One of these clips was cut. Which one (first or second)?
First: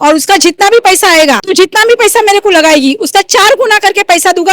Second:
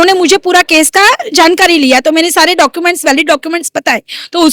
first